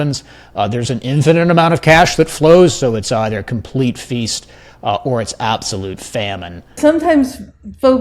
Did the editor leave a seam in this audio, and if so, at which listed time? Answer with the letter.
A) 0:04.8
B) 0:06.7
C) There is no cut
B